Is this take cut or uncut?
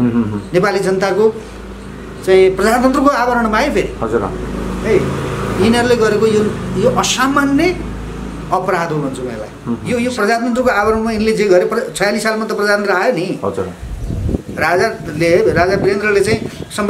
cut